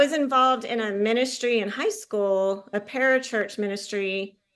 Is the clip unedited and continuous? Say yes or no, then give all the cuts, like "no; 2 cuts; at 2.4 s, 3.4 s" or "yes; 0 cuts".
yes; 0 cuts